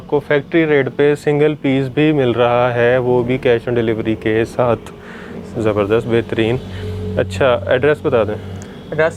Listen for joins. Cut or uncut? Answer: uncut